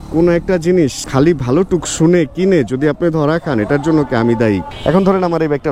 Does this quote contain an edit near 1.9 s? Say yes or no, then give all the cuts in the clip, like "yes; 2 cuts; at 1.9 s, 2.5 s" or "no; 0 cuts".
no; 1 cut; at 4.7 s